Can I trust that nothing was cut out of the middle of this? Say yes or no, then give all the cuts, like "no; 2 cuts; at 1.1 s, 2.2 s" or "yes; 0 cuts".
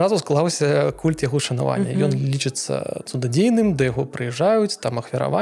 yes; 0 cuts